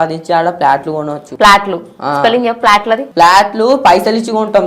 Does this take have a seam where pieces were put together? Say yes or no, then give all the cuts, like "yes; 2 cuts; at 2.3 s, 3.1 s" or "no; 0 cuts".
yes; 2 cuts; at 1.2 s, 3.1 s